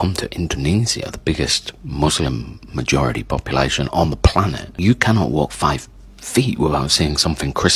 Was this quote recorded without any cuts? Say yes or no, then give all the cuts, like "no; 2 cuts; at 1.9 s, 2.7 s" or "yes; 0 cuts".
yes; 0 cuts